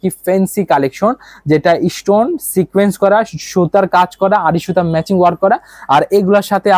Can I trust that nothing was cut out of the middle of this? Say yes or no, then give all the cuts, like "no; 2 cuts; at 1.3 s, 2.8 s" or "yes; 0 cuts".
yes; 0 cuts